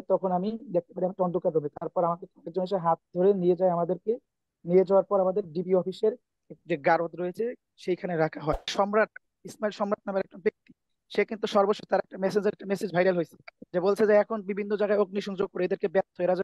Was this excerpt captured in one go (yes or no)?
no